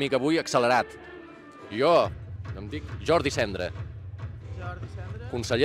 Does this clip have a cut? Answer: no; 0 cuts

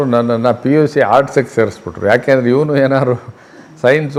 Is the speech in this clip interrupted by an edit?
no; 0 cuts

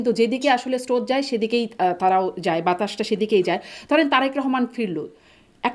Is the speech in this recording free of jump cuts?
yes; 0 cuts

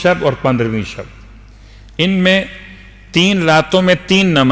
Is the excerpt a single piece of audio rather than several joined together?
yes; 0 cuts

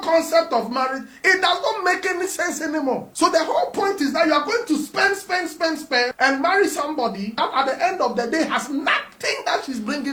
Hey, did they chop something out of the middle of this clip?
no; 0 cuts

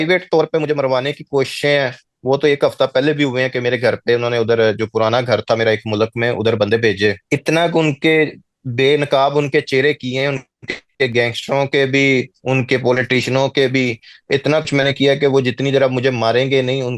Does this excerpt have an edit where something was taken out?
yes; 1 cut; at 7.2 s

